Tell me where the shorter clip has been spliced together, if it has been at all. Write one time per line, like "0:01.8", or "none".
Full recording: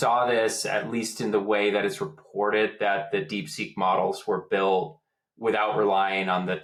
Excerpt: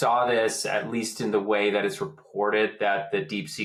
none

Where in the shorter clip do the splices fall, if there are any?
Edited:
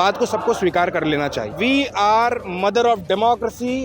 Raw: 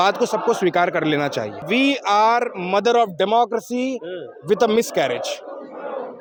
0:01.5

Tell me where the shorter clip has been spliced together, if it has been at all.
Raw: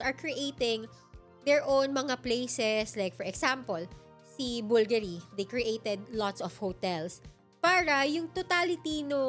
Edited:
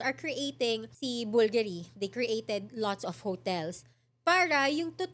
0:00.9

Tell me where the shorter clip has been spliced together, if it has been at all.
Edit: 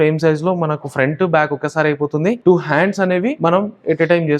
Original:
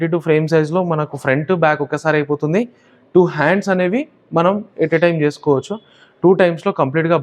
0:02.4
0:03.4

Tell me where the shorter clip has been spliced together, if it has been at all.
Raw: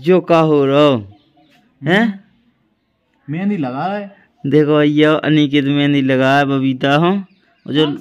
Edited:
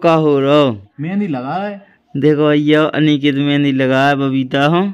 0:00.9

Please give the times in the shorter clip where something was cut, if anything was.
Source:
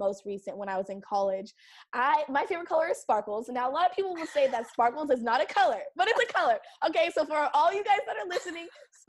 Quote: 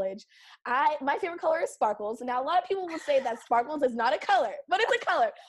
none

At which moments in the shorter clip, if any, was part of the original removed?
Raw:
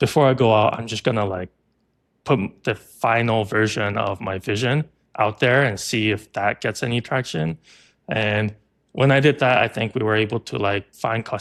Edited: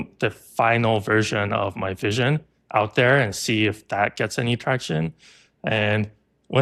none

